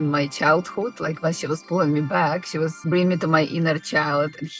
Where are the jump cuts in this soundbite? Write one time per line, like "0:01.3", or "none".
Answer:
0:02.8